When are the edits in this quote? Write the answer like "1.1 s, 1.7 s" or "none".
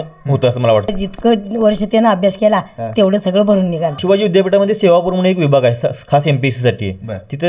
0.9 s, 4.0 s